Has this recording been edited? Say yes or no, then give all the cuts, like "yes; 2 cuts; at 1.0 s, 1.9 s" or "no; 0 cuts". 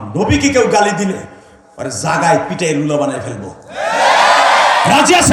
no; 0 cuts